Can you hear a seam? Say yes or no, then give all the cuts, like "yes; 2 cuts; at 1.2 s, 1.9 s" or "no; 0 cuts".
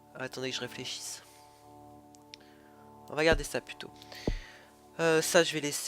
yes; 1 cut; at 4.1 s